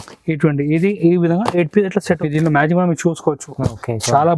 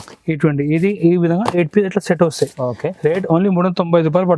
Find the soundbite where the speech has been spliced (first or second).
first